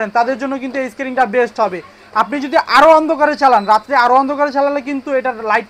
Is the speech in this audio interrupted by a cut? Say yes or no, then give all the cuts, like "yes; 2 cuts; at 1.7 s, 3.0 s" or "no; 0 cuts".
no; 0 cuts